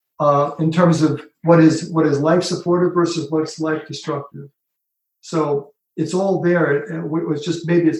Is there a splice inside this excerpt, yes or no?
no